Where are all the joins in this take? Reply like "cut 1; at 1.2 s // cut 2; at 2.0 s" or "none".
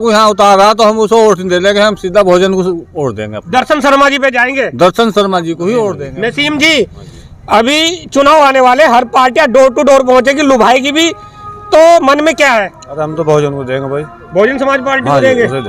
cut 1; at 6.0 s